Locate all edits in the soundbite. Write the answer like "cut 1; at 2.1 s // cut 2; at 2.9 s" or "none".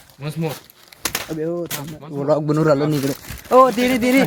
none